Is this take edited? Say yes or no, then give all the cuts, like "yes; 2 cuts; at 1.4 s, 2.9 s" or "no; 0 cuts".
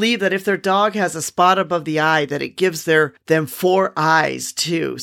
no; 0 cuts